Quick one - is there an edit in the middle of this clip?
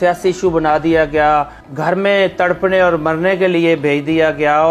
yes; 1 cut; at 1.6 s

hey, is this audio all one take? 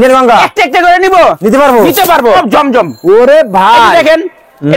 no; 1 cut; at 2.4 s

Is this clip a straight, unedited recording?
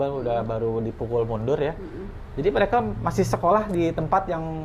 yes; 0 cuts

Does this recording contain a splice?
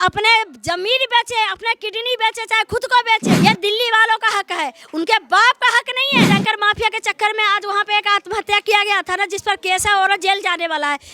yes; 2 cuts; at 3.3 s, 6.3 s

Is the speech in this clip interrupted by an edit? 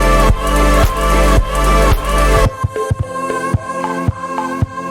no; 0 cuts

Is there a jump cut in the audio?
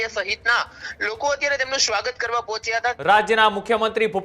yes; 1 cut; at 3.0 s

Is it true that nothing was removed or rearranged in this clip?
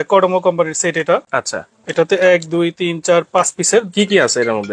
yes; 0 cuts

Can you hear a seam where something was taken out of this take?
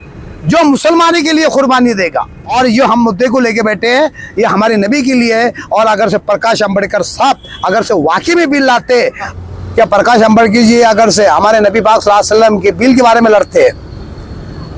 yes; 2 cuts; at 2.4 s, 9.3 s

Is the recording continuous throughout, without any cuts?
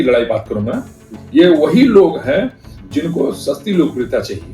no; 1 cut; at 1.1 s

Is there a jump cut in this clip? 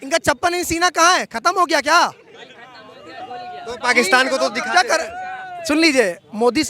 no; 0 cuts

